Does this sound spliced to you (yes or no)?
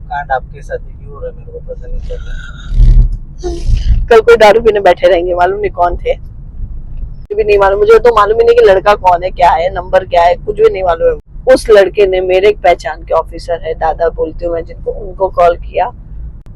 yes